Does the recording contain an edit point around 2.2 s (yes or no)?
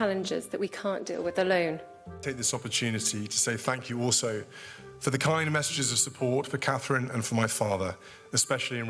yes